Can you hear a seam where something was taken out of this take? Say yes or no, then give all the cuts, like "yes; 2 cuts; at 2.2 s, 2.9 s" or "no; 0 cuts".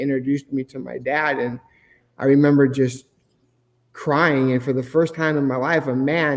no; 0 cuts